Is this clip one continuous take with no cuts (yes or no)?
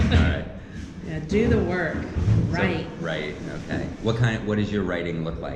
yes